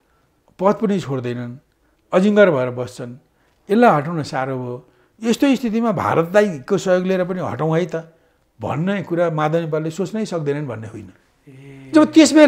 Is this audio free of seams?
yes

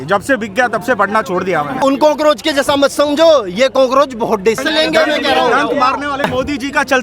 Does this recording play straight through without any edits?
no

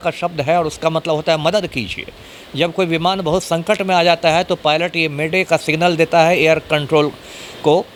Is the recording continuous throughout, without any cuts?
yes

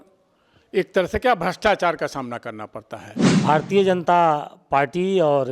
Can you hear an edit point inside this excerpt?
yes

